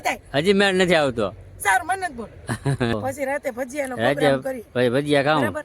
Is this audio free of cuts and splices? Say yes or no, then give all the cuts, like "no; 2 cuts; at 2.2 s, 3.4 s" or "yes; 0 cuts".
no; 1 cut; at 2.9 s